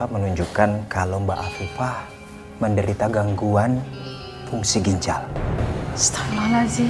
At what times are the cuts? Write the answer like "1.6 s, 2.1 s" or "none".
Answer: none